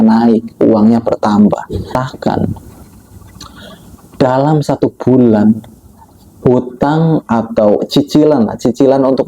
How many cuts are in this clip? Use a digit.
1